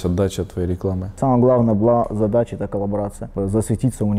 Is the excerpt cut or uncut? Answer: cut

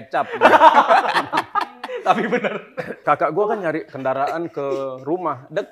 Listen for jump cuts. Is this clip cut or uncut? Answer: cut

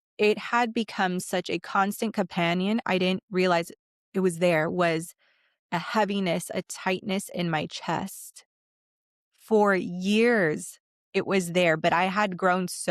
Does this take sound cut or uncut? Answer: uncut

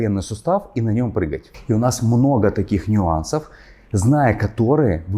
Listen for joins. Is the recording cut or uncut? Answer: uncut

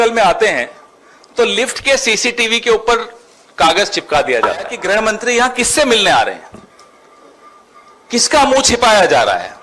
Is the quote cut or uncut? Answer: cut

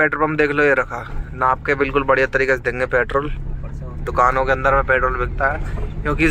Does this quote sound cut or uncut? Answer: uncut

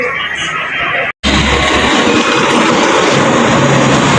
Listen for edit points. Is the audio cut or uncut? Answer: uncut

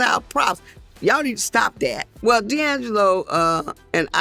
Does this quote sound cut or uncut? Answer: cut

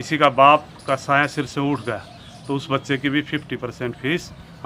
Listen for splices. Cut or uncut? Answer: uncut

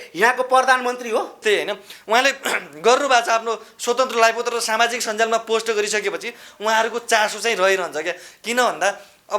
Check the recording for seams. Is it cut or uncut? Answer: cut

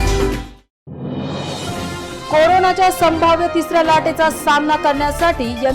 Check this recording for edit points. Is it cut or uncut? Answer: uncut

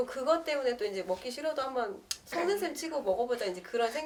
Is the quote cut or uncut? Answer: uncut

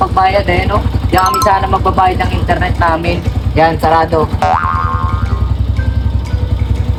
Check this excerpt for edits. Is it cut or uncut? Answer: uncut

